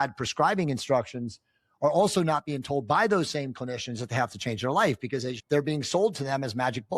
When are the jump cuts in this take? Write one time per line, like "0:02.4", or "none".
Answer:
0:05.3